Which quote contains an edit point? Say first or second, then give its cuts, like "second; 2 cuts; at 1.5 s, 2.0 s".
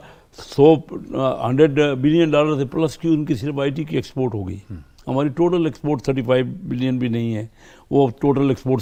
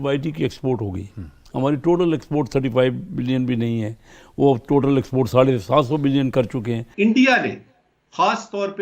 second; 1 cut; at 6.8 s